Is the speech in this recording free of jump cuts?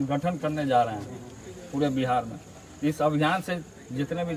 yes; 0 cuts

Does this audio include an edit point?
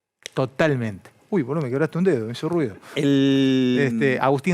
no; 0 cuts

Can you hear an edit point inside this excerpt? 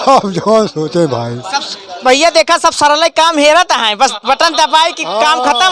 no; 0 cuts

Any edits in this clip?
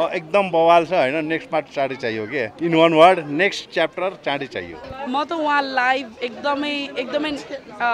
yes; 1 cut; at 4.8 s

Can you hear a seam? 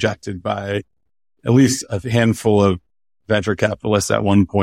no; 0 cuts

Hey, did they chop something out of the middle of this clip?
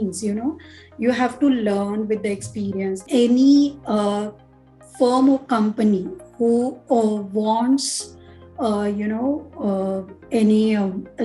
yes; 1 cut; at 3.0 s

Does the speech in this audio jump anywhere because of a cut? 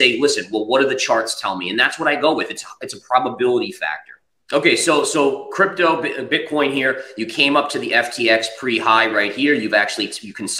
no; 0 cuts

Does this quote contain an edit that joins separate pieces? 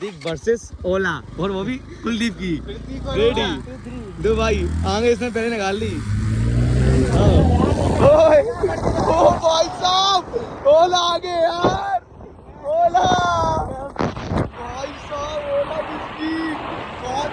no; 0 cuts

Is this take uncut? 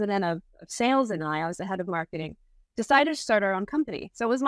yes; 0 cuts

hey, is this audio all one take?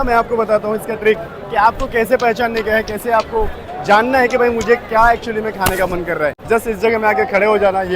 no; 1 cut; at 6.4 s

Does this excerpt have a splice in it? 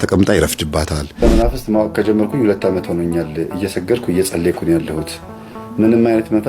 yes; 1 cut; at 1.2 s

